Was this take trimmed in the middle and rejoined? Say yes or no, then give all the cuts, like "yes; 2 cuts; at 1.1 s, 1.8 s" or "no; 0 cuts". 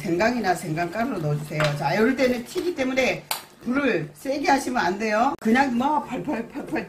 no; 0 cuts